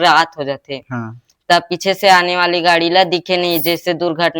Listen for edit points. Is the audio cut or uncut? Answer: uncut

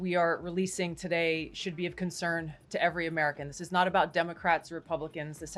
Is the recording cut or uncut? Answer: uncut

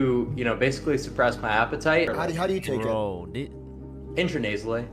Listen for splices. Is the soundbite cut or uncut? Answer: cut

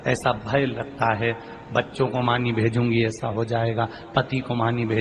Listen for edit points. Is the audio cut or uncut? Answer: cut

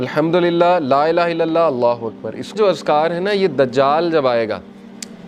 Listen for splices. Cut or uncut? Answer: cut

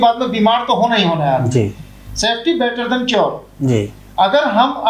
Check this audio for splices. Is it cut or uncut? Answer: uncut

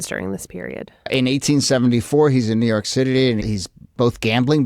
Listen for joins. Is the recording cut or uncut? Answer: cut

